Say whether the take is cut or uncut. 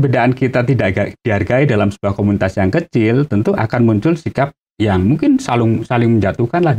uncut